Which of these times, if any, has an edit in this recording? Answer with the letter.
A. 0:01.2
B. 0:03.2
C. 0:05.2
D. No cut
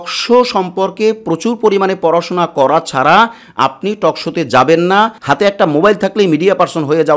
C